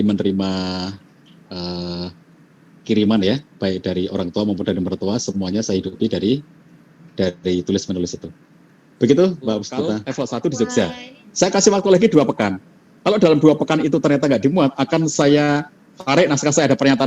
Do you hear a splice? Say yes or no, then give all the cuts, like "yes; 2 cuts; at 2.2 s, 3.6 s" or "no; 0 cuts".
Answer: yes; 1 cut; at 10.1 s